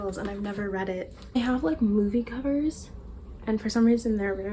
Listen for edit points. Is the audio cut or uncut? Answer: cut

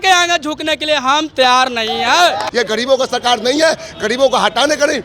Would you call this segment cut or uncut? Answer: cut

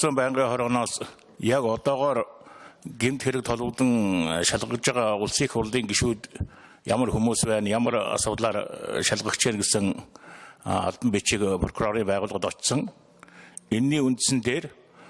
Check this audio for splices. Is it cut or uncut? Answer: cut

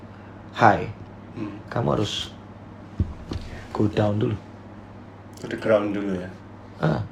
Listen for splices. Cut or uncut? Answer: uncut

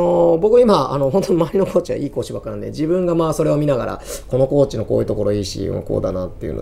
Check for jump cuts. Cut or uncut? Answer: uncut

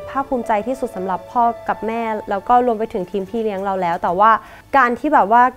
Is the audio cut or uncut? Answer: cut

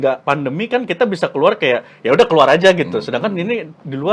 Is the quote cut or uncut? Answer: uncut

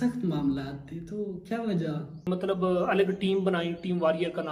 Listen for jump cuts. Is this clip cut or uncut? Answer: cut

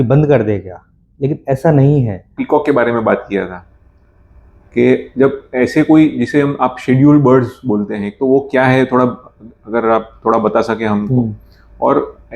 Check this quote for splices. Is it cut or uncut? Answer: cut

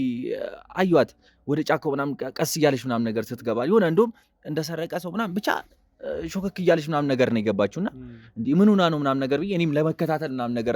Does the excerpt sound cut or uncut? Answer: uncut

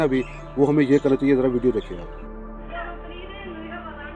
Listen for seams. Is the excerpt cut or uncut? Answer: uncut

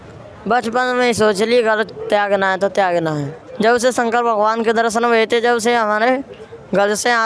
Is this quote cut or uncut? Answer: cut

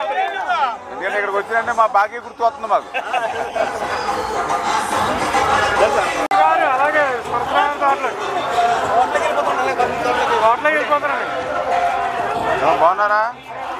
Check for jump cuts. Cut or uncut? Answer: cut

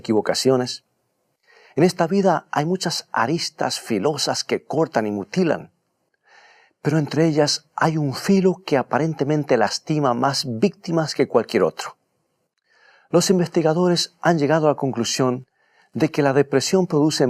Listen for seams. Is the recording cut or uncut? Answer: cut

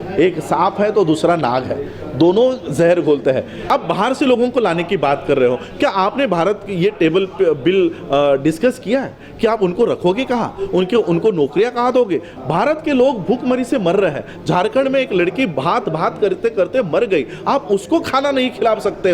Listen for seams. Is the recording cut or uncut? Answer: cut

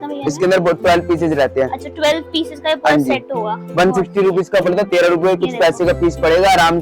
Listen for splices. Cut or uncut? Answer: uncut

